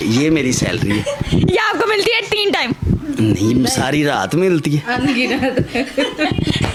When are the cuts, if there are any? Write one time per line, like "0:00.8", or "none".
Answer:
none